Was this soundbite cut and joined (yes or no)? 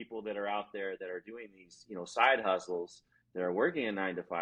no